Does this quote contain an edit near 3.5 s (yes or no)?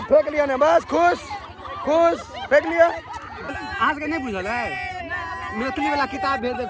yes